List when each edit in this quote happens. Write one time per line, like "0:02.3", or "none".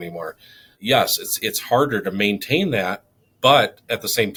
none